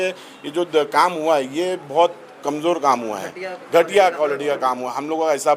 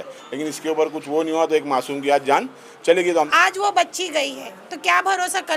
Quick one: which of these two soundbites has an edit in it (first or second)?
second